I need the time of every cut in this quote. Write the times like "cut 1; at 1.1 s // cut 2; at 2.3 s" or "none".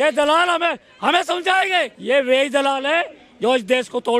cut 1; at 1.9 s